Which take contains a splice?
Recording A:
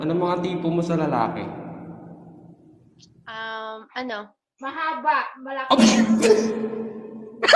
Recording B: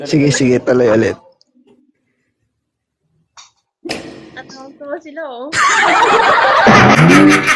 B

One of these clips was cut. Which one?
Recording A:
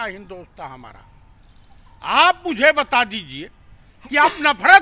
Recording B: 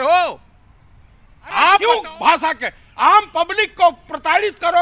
B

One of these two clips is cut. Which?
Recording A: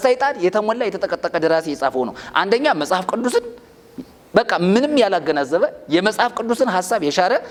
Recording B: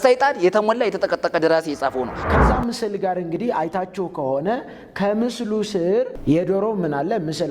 B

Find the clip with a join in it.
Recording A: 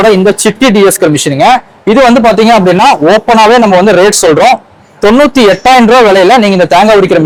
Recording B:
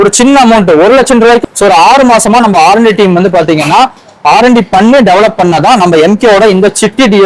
B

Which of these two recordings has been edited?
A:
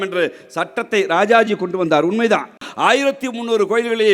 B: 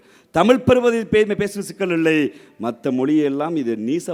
A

